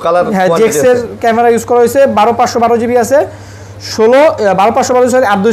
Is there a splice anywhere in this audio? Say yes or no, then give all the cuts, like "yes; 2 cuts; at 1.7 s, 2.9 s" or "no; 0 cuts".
no; 0 cuts